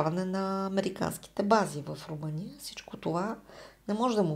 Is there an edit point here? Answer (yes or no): no